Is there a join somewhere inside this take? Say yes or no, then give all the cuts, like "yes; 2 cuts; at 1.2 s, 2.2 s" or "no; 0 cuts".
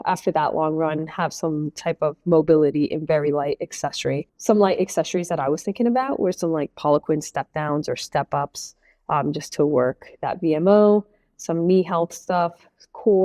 yes; 1 cut; at 4.3 s